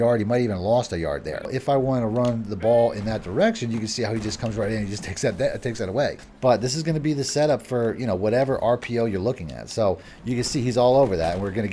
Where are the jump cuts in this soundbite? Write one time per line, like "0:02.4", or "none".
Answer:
0:01.5
0:06.3
0:10.1